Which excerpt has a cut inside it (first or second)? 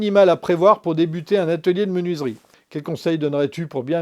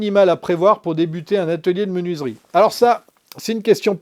first